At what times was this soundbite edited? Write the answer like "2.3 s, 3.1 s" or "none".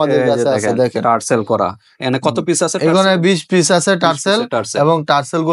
none